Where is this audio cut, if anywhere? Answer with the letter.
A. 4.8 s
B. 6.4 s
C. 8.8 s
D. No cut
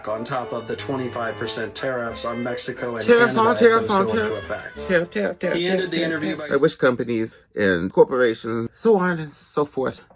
B